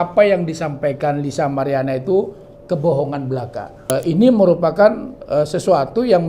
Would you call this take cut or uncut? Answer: cut